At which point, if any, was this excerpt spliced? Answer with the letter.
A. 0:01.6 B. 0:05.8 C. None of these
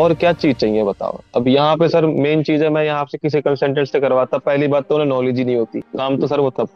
B